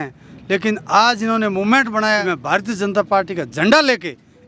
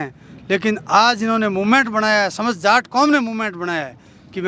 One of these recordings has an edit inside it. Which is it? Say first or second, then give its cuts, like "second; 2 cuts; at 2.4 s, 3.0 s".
first; 1 cut; at 2.2 s